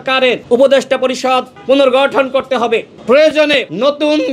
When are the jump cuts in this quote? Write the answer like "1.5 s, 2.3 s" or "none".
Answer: none